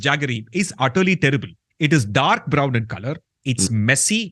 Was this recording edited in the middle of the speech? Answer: no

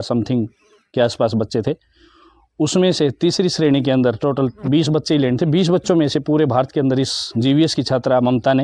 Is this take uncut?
yes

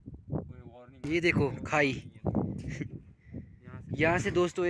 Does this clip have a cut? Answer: yes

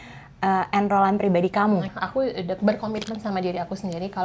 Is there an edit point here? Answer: yes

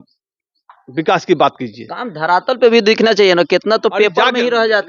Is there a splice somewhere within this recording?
no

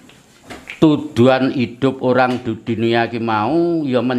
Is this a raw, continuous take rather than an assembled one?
yes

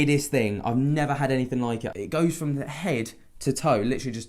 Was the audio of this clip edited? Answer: yes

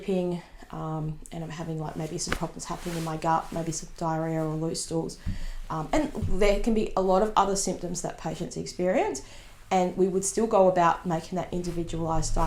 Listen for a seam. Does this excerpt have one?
no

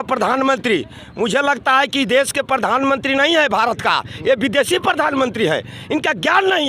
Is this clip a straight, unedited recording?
yes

